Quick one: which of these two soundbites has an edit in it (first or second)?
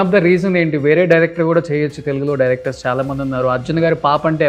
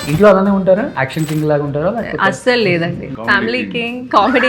second